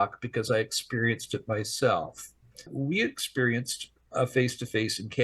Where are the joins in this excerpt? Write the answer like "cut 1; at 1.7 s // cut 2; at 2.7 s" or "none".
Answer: cut 1; at 2.7 s